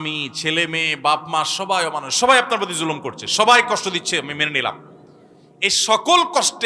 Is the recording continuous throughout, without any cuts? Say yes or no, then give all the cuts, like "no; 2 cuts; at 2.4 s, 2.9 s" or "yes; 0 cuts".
yes; 0 cuts